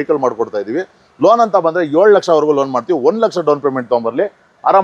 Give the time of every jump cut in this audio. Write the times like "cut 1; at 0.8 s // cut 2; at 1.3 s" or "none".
none